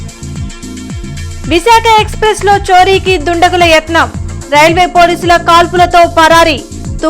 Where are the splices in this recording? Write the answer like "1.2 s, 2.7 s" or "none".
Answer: 1.0 s

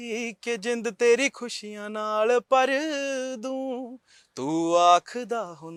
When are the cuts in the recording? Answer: none

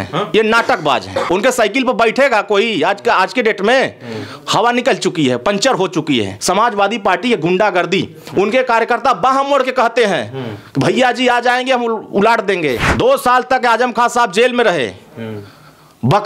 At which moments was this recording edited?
1.2 s, 6.3 s, 12.9 s

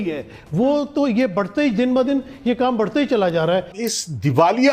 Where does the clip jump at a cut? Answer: 3.7 s

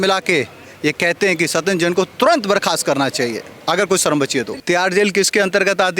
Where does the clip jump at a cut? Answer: 4.5 s

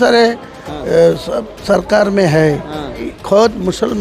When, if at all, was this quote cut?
3.1 s

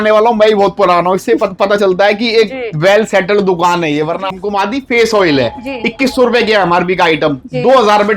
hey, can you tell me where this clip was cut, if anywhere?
4.3 s

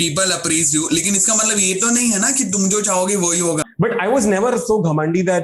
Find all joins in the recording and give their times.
3.7 s

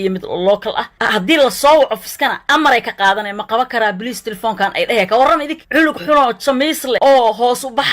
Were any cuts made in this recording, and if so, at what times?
0.9 s

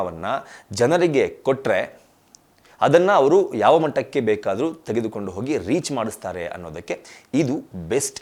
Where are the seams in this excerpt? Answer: none

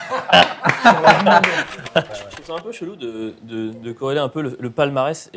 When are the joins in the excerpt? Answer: 2.1 s

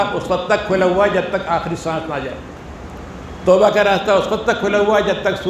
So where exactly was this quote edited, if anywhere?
none

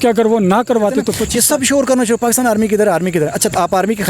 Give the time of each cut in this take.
1.2 s

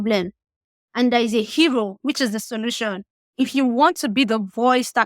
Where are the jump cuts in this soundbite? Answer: 3.2 s

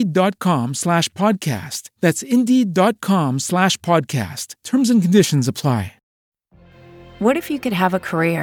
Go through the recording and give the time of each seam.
6.2 s

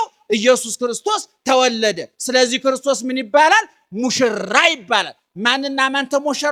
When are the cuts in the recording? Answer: none

